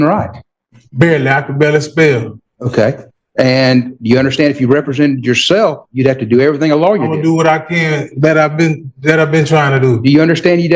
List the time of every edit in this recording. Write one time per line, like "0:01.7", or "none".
none